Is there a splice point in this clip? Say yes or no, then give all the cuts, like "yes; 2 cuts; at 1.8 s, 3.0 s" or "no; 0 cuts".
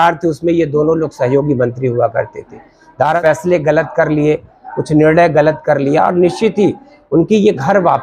yes; 1 cut; at 3.2 s